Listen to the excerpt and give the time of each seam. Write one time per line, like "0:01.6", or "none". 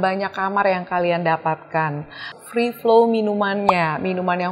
0:02.4